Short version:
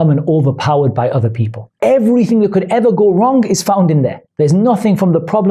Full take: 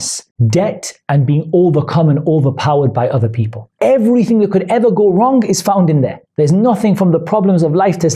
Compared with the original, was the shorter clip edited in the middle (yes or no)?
no